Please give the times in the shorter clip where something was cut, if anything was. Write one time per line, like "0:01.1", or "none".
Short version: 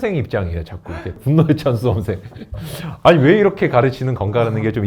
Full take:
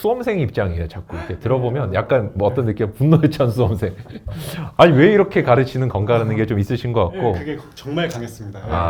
0:01.2